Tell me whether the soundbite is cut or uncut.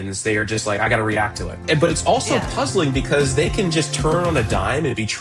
cut